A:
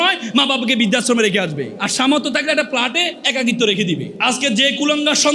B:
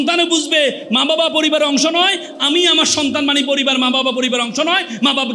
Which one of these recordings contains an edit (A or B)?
A